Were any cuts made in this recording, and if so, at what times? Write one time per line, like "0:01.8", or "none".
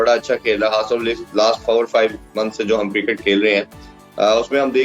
none

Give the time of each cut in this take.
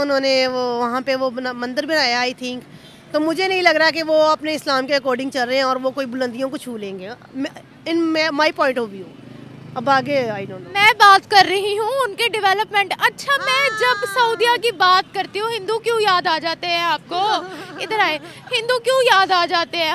none

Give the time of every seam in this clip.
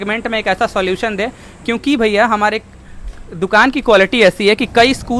none

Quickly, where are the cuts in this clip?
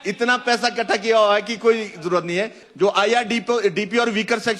0:02.6

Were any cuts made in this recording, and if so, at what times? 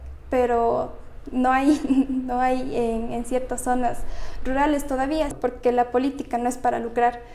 0:05.3

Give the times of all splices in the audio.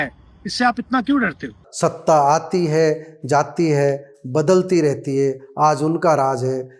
0:01.6

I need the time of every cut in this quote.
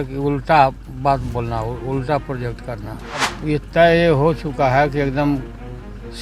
0:03.3

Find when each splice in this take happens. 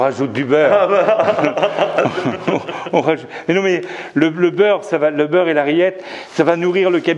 none

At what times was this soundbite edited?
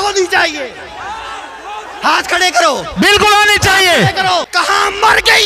0:04.5

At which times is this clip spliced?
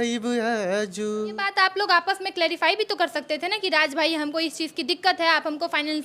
0:01.5

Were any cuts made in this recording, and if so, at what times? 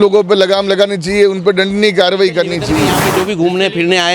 0:03.0

